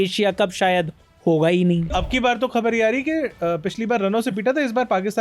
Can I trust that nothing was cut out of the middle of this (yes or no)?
no